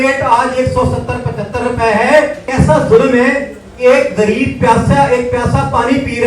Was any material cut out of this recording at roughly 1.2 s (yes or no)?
no